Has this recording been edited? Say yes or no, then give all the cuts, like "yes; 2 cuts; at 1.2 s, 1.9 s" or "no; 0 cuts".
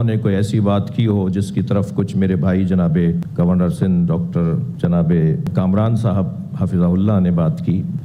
no; 0 cuts